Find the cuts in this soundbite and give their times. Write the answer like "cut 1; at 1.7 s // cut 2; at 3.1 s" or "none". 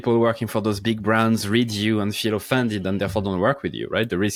none